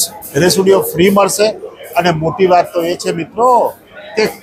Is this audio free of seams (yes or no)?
yes